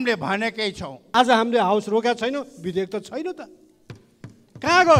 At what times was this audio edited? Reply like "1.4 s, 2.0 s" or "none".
1.0 s